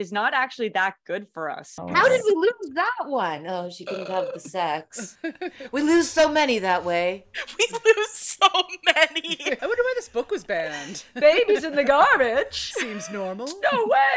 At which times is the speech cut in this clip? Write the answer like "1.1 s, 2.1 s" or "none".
1.7 s, 9.6 s

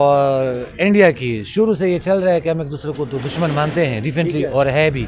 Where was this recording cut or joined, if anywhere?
none

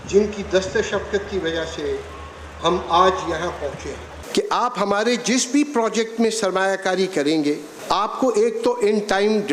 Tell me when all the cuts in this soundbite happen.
4.1 s, 7.7 s

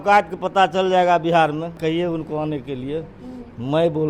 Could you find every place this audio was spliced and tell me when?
1.8 s

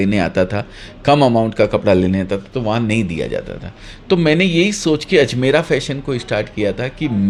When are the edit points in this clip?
none

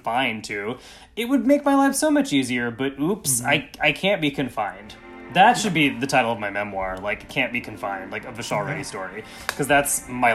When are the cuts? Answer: none

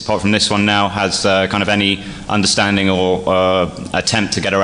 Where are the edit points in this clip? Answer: 3.2 s

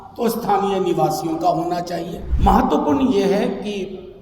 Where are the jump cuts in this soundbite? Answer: 2.2 s

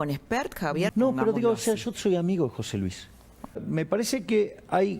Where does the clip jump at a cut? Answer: 0.9 s, 3.6 s

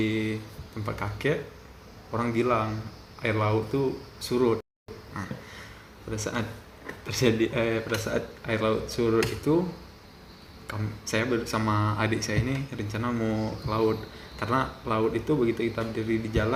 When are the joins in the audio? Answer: none

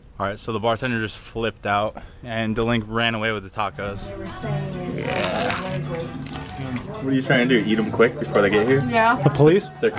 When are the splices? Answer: none

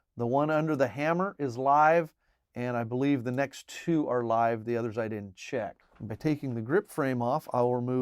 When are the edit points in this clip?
5.9 s

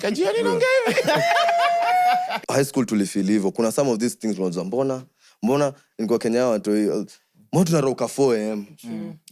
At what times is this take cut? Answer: 2.4 s

